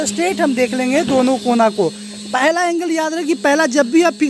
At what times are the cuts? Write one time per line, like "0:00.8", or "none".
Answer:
none